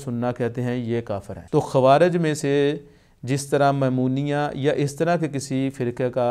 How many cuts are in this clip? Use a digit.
1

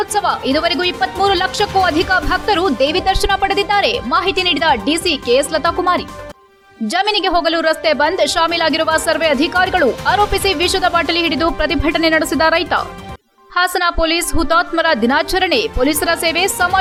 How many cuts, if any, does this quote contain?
0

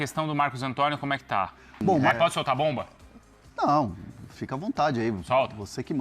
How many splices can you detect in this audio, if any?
1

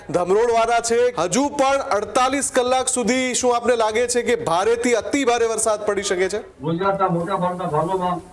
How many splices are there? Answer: 2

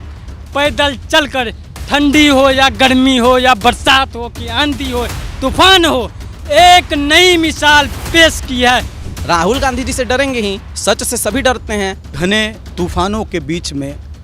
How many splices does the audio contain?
3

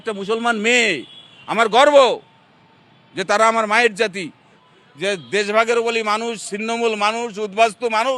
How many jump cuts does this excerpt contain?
1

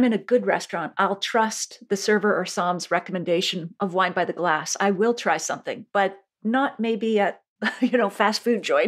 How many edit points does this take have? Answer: 0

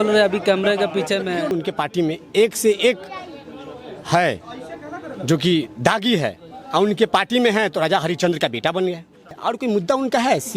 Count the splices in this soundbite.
2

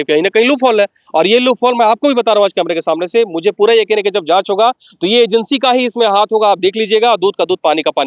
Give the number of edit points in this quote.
0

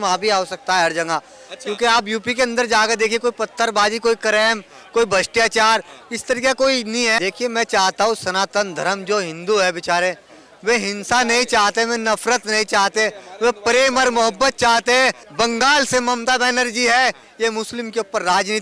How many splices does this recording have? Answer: 2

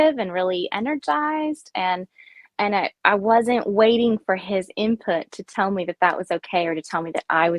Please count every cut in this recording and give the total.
0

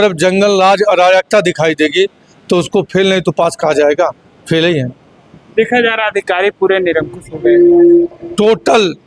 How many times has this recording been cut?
0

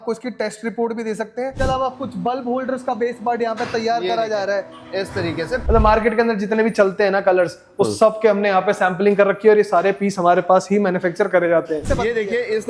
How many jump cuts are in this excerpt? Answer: 3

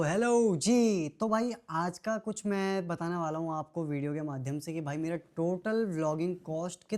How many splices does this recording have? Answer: 0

